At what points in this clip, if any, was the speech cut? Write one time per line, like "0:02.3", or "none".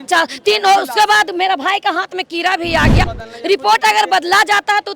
0:03.1

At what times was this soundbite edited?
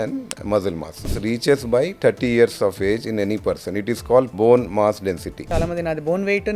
0:01.2
0:04.3
0:05.4

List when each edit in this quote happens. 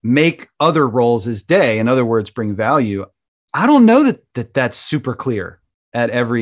none

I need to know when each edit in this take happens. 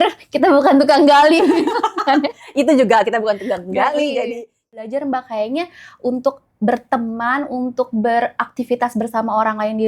0:04.8

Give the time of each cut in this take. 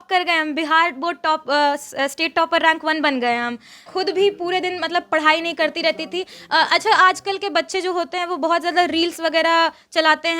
0:03.9

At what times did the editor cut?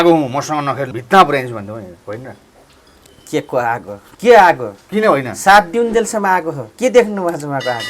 0:01.0
0:04.0
0:06.6

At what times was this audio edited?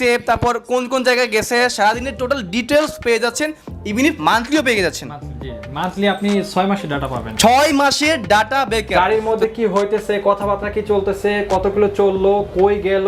0:08.9

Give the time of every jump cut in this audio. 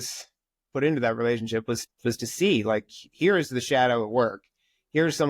none

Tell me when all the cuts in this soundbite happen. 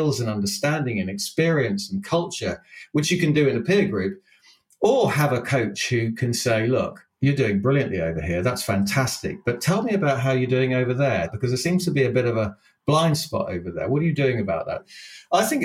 0:07.0
0:11.3
0:14.8

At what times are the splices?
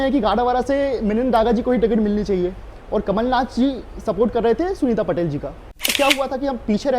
0:05.9

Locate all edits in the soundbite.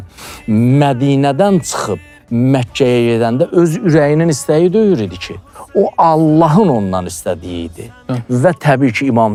none

